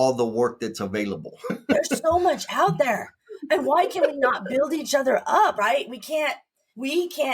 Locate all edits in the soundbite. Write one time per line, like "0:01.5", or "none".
0:05.5

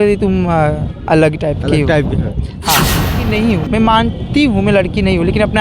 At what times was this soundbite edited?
0:03.1

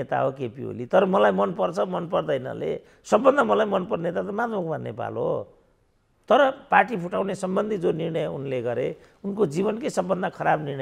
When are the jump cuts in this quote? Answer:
none

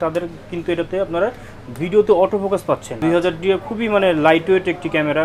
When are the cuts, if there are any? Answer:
0:03.0

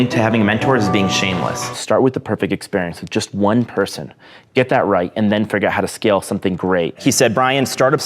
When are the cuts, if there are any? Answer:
0:01.7
0:07.0

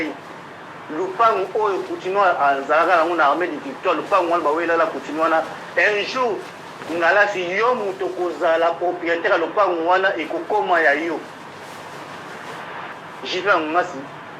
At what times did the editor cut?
0:13.0

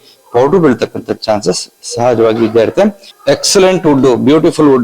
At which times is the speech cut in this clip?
0:03.1

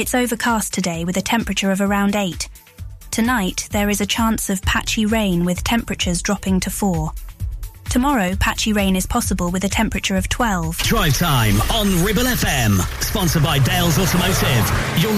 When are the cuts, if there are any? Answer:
0:10.8

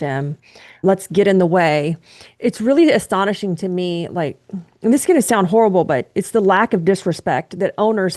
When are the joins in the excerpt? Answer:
0:02.2

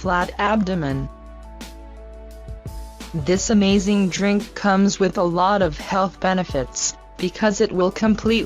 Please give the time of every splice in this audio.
0:01.9

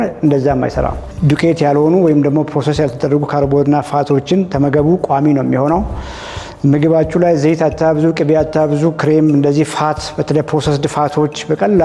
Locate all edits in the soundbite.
0:01.1

